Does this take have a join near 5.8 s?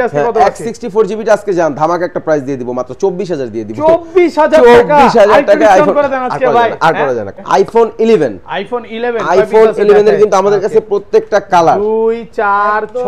no; 1 cut; at 7.3 s

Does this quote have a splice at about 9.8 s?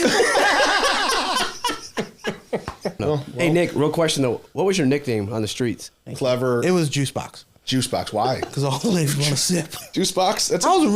yes; 3 cuts; at 3.0 s, 6.0 s, 9.8 s

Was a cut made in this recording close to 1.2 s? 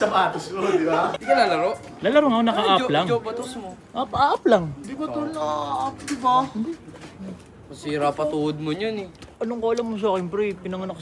yes; 1 cut; at 1.2 s

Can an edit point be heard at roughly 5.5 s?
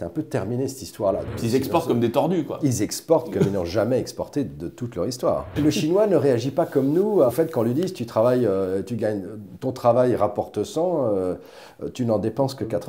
yes; 3 cuts; at 1.3 s, 5.5 s, 7.3 s

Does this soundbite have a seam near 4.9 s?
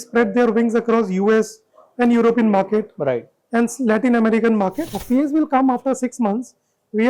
yes; 1 cut; at 4.9 s

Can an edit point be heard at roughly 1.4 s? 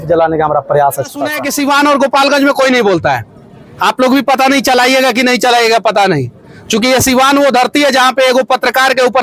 yes; 1 cut; at 1.4 s

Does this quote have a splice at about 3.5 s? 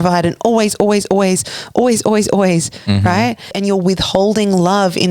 yes; 1 cut; at 3.5 s

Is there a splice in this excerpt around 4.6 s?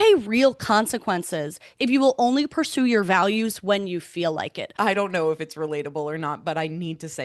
yes; 2 cuts; at 1.7 s, 4.6 s

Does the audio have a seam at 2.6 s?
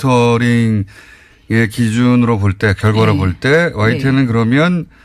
yes; 1 cut; at 2.6 s

